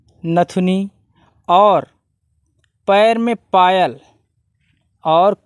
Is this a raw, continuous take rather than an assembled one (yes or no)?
yes